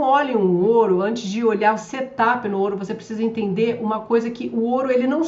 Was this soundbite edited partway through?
no; 0 cuts

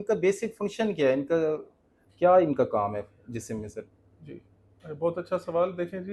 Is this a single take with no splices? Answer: yes; 0 cuts

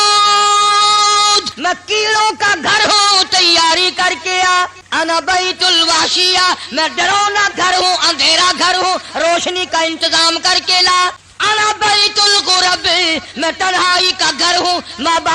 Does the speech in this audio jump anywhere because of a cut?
yes; 3 cuts; at 1.5 s, 4.8 s, 11.3 s

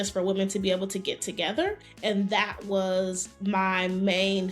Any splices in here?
yes; 1 cut; at 1.9 s

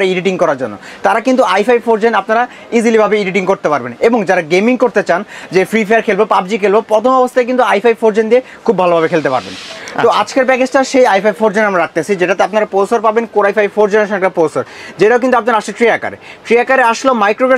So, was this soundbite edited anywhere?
no; 0 cuts

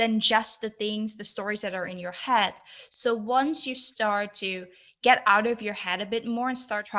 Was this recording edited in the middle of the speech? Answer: no; 0 cuts

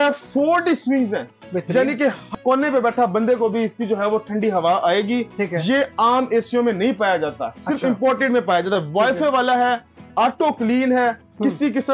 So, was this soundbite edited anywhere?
yes; 1 cut; at 2.3 s

